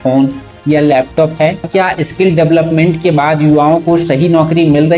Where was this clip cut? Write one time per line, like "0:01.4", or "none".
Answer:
0:01.7